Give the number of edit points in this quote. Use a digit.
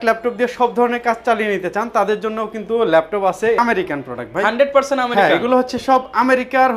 1